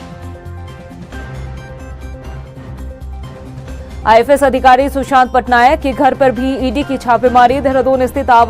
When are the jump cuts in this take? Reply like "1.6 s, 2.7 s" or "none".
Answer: 1.2 s